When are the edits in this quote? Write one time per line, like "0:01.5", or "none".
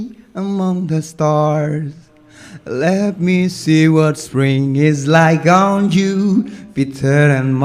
none